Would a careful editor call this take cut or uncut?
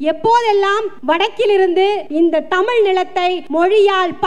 cut